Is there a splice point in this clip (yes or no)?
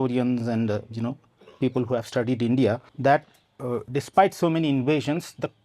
yes